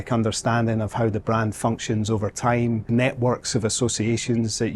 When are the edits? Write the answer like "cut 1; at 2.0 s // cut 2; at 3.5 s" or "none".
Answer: cut 1; at 2.8 s